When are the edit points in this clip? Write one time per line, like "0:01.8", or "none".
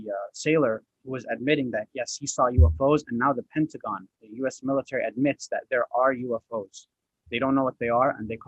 none

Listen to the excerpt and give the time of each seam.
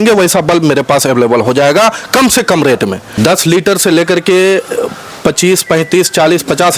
0:03.1

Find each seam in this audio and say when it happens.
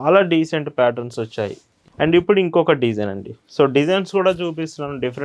0:01.9

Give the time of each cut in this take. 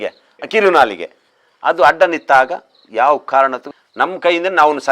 0:03.7

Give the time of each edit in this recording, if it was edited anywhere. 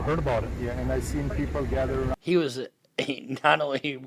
0:02.2

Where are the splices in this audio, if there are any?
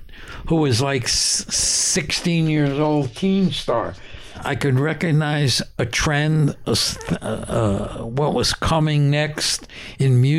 0:04.5

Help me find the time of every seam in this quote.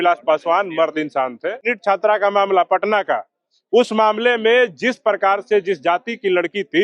0:01.7

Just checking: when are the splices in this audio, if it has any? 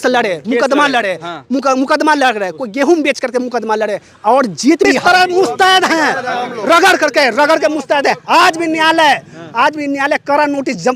0:05.0

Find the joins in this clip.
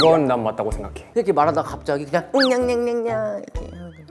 0:01.0

